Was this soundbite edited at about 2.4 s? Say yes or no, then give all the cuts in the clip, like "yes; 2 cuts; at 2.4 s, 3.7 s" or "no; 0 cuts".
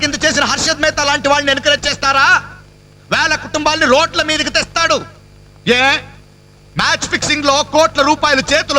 no; 0 cuts